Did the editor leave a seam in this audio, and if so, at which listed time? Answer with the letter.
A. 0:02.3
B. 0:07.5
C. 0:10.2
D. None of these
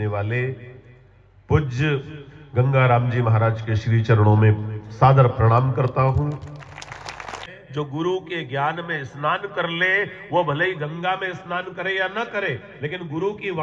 B